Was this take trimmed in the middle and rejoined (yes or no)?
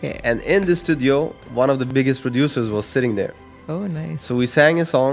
yes